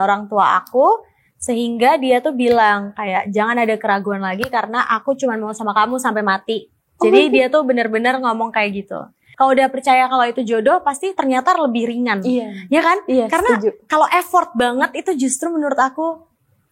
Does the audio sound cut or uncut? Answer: cut